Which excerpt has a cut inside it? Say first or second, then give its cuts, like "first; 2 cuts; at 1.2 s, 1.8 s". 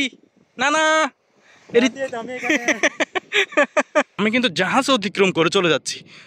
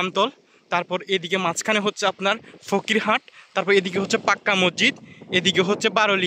first; 1 cut; at 4.1 s